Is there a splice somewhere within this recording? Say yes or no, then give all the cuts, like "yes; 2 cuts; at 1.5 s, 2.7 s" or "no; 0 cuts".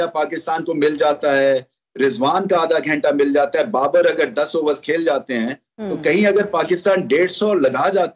no; 0 cuts